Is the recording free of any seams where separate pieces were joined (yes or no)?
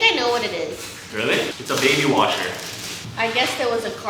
no